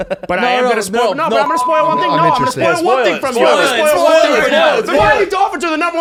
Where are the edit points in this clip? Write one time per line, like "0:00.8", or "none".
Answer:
none